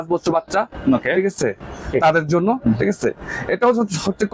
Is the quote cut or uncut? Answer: uncut